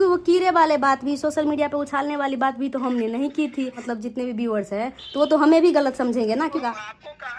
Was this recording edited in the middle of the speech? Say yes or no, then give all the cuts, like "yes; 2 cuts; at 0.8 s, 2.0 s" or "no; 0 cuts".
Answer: yes; 2 cuts; at 3.9 s, 6.6 s